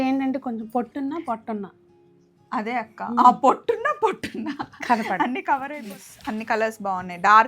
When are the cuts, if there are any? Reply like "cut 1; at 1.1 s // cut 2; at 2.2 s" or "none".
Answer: cut 1; at 5.7 s